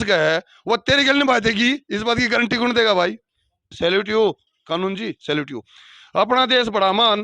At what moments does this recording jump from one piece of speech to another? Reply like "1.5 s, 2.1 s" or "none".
3.7 s